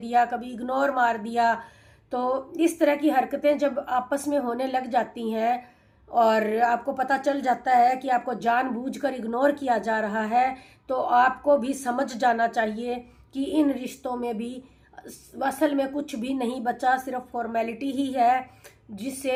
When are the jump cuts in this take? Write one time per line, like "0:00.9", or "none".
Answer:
none